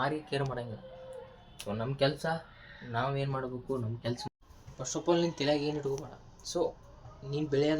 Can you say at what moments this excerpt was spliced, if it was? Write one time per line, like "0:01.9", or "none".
0:04.3

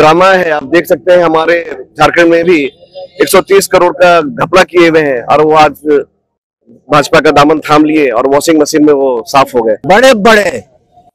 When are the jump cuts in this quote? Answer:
0:09.8

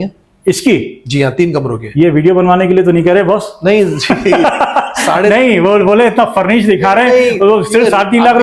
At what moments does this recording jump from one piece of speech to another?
none

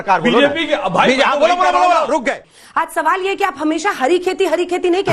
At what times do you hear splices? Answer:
0:02.5

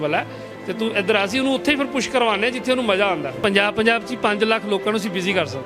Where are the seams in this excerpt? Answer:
0:03.4

